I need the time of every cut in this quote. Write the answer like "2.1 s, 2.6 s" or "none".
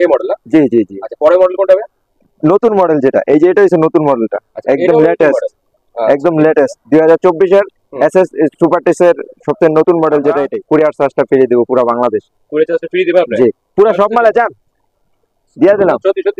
10.5 s